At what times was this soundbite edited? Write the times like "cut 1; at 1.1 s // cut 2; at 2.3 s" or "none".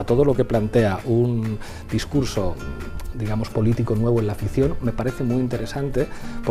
none